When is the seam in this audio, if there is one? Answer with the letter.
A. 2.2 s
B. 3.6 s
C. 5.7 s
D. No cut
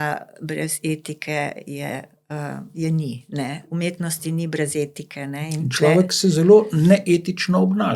B